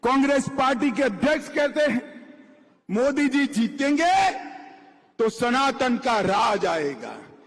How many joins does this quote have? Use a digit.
0